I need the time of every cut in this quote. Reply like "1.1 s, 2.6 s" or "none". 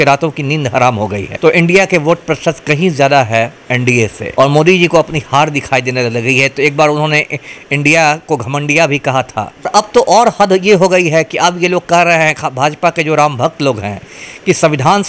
1.2 s, 4.2 s, 9.7 s